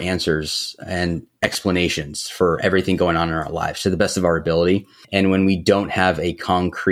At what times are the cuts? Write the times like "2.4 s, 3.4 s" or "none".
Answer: none